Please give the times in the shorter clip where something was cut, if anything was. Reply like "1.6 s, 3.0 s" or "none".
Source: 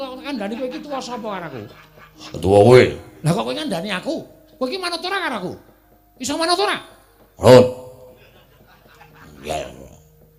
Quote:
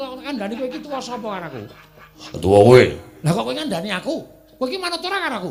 none

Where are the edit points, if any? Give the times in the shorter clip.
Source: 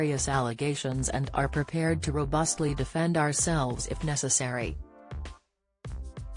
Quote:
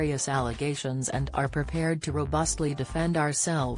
none

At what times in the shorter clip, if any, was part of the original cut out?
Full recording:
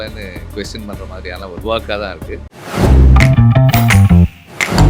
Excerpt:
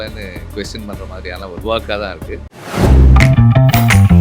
none

